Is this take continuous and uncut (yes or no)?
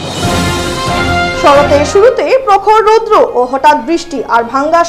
yes